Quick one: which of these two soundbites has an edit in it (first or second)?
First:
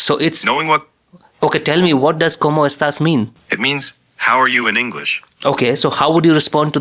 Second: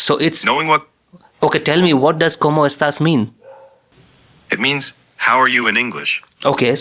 first